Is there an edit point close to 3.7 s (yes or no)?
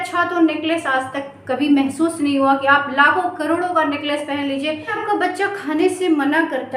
no